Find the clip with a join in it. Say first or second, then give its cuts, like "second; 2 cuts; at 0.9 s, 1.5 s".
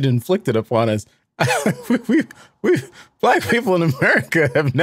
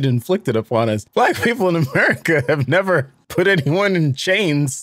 second; 2 cuts; at 1.0 s, 3.2 s